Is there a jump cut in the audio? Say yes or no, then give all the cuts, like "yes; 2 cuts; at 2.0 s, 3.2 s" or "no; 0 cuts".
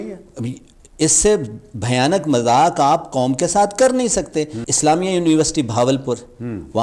yes; 1 cut; at 4.6 s